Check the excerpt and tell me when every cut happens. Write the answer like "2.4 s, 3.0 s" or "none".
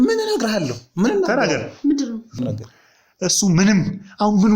2.4 s